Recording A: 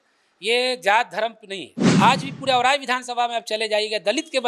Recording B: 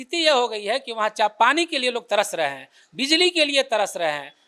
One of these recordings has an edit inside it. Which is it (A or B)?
A